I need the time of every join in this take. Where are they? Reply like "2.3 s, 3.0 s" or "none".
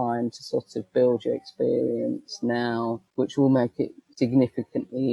3.0 s

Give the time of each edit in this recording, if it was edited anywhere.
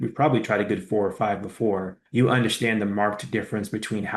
none

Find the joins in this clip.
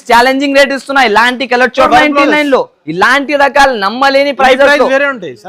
1.9 s

